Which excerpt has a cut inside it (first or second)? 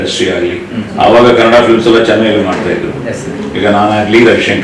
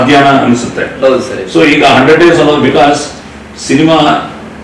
first